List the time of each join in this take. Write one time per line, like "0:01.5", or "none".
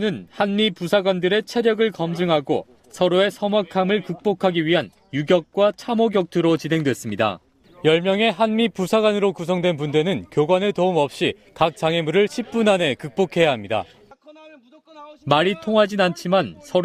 none